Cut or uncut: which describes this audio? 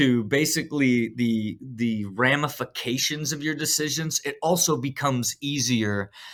uncut